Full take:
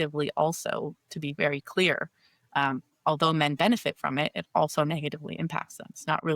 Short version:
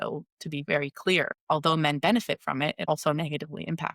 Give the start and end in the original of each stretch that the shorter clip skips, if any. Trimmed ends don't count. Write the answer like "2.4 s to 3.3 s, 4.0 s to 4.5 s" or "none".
2.1 s to 2.9 s, 4.5 s to 4.6 s